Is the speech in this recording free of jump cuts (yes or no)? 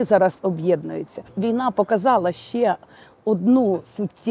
no